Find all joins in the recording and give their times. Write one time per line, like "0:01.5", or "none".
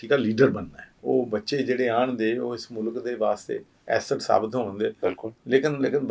0:00.9